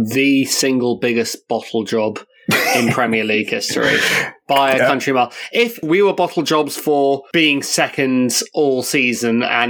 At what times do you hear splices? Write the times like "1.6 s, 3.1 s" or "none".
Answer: 5.8 s